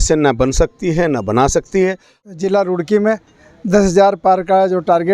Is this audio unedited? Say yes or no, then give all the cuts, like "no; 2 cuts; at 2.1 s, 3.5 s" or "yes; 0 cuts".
no; 1 cut; at 2.1 s